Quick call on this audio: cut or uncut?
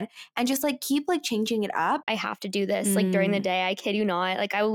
cut